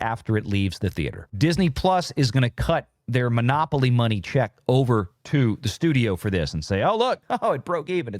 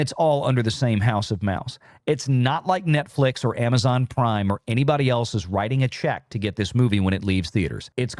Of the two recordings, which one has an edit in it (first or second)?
first